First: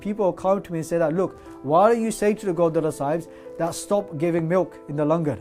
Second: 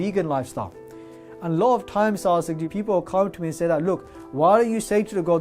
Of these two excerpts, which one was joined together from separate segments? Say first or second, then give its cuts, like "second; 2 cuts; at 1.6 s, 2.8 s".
second; 1 cut; at 0.9 s